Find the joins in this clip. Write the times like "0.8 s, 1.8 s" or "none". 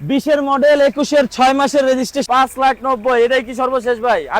2.2 s